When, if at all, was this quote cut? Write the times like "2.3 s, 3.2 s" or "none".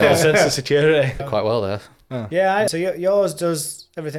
1.2 s, 2.7 s